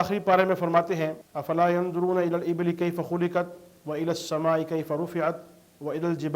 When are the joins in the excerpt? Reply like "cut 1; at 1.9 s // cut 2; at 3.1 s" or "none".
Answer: cut 1; at 1.3 s